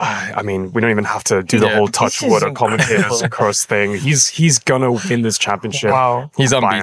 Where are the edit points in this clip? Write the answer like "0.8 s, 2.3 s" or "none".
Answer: none